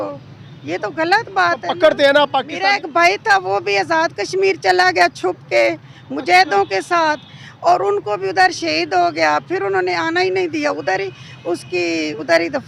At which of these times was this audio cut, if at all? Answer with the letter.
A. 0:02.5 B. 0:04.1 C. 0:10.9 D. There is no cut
A